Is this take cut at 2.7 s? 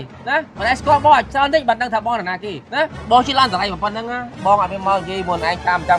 no; 0 cuts

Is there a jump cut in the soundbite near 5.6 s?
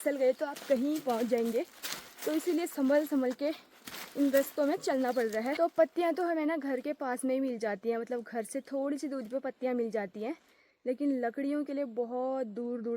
yes; 1 cut; at 5.6 s

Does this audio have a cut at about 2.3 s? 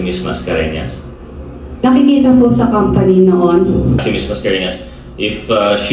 no; 1 cut; at 4.0 s

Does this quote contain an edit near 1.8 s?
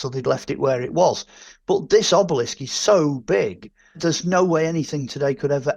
no; 1 cut; at 4.0 s

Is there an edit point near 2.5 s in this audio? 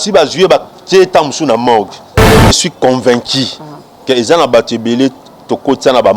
yes; 1 cut; at 2.5 s

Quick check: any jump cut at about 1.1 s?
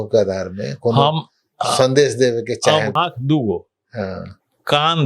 no; 1 cut; at 2.9 s

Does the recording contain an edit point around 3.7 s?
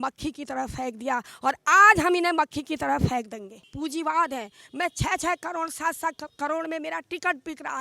yes; 1 cut; at 3.7 s

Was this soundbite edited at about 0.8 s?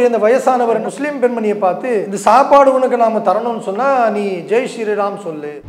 yes; 2 cuts; at 0.8 s, 2.1 s

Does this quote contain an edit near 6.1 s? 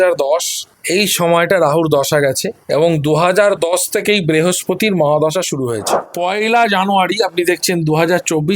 yes; 1 cut; at 6.1 s

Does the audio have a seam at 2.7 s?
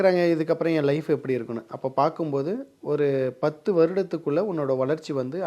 no; 0 cuts

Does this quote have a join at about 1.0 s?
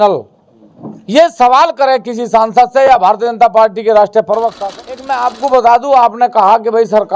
no; 1 cut; at 4.5 s

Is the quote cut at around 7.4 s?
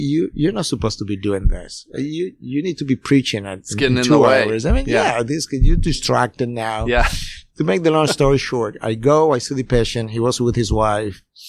no; 0 cuts

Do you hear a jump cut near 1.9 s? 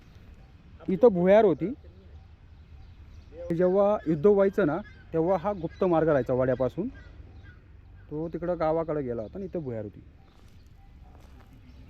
no; 1 cut; at 3.5 s

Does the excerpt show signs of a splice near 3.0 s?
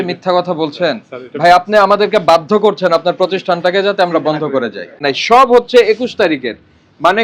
no; 1 cut; at 5.1 s

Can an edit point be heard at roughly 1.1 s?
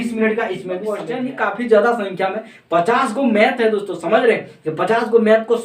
yes; 1 cut; at 1.1 s

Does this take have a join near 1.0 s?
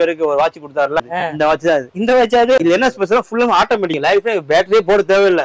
yes; 3 cuts; at 1.0 s, 2.6 s, 4.0 s

